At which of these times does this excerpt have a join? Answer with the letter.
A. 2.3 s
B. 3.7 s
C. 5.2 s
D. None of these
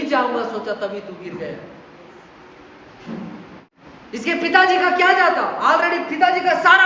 B